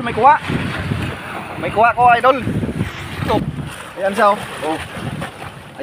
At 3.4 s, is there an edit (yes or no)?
yes